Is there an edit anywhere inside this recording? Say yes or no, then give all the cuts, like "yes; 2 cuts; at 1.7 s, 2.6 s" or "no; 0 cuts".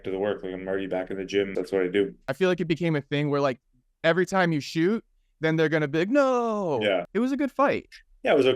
yes; 3 cuts; at 1.5 s, 2.2 s, 7.1 s